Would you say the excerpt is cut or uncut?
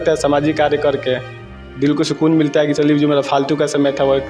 uncut